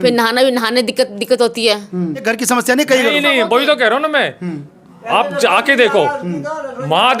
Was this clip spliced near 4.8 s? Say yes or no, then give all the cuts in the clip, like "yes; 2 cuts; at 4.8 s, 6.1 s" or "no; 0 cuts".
no; 1 cut; at 2.3 s